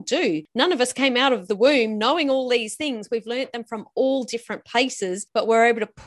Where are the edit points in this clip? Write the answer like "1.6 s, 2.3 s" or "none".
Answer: 1.5 s